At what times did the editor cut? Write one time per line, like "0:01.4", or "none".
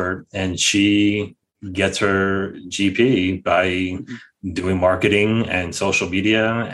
none